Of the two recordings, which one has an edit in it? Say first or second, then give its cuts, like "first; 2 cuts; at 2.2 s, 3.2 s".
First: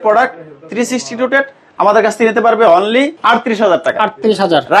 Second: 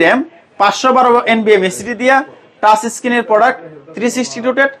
first; 1 cut; at 3.2 s